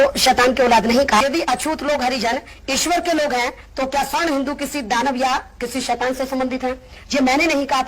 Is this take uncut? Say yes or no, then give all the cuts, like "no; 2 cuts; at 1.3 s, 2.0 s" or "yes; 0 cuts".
no; 1 cut; at 1.2 s